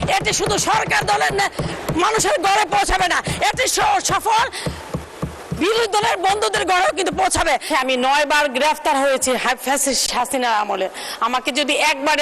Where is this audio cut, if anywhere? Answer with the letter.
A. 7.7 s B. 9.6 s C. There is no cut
A